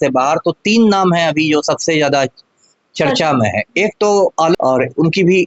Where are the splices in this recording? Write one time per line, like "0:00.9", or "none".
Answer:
0:04.5